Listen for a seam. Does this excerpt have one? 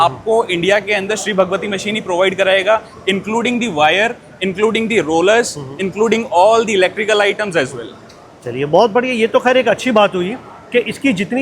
no; 0 cuts

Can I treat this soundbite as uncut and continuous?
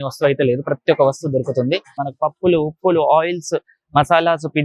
no; 1 cut; at 2.0 s

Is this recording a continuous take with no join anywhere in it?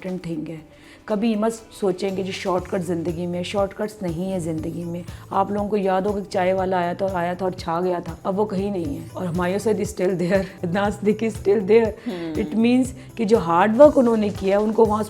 no; 3 cuts; at 8.1 s, 9.1 s, 10.6 s

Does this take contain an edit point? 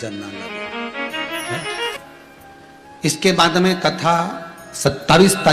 yes; 1 cut; at 2.0 s

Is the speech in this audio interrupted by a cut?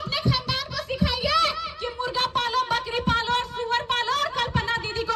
no; 0 cuts

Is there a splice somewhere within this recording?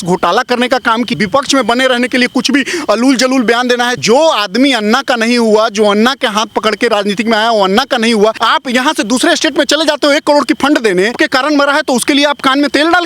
yes; 4 cuts; at 1.1 s, 4.0 s, 8.4 s, 11.1 s

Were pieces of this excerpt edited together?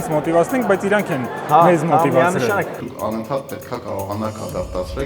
yes; 1 cut; at 2.8 s

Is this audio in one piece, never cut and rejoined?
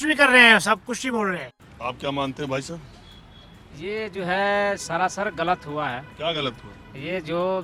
yes; 0 cuts

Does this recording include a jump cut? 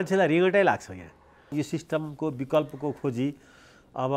yes; 1 cut; at 1.5 s

